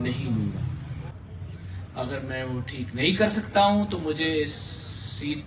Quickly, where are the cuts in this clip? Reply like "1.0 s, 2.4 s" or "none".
1.1 s